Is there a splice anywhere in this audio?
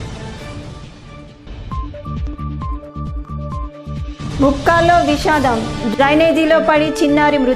yes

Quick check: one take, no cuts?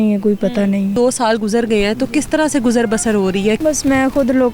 no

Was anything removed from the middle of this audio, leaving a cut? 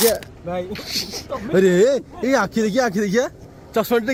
no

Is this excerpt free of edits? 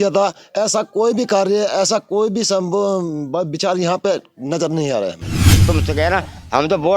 no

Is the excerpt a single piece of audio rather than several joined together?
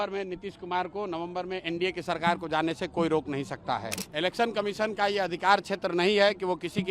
no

